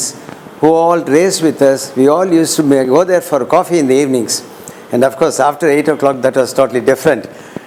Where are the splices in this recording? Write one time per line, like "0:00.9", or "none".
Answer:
none